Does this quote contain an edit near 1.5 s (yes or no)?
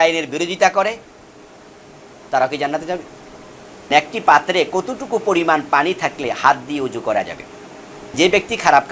no